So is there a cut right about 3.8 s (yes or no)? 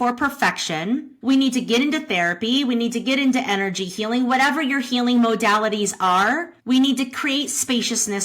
no